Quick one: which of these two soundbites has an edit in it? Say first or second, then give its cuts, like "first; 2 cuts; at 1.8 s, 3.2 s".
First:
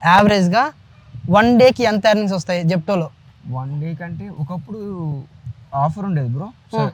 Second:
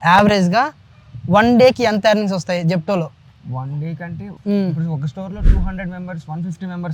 second; 1 cut; at 4.3 s